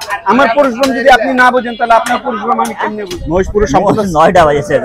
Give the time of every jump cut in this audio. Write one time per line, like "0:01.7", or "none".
0:03.1